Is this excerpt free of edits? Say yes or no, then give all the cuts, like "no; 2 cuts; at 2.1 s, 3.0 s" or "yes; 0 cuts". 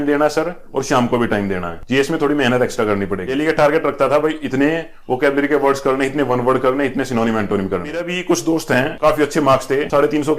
no; 2 cuts; at 3.3 s, 8.1 s